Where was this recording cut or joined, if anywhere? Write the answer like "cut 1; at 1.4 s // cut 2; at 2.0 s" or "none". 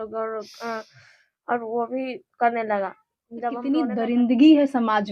cut 1; at 3.6 s